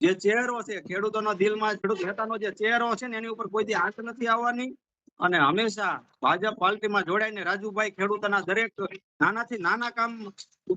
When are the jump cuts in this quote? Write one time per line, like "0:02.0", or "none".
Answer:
0:01.8